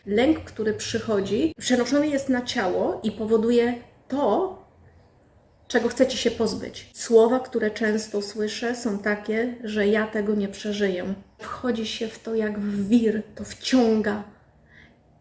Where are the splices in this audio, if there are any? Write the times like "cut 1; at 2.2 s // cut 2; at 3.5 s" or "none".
cut 1; at 1.6 s // cut 2; at 7.0 s // cut 3; at 11.5 s